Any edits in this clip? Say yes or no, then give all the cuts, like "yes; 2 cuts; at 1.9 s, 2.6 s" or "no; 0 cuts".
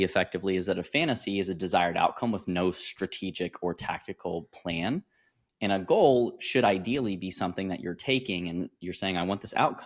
no; 0 cuts